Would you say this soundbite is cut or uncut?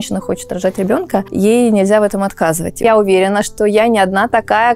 cut